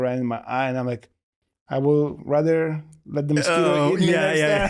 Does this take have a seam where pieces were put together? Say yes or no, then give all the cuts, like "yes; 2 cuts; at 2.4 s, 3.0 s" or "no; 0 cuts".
no; 0 cuts